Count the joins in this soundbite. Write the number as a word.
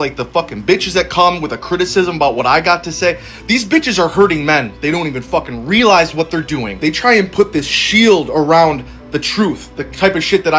two